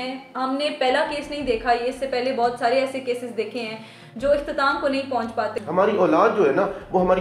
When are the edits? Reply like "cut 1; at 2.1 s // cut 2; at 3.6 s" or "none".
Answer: cut 1; at 5.5 s